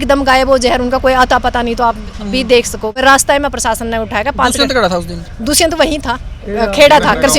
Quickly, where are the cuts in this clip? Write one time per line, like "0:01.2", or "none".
0:03.0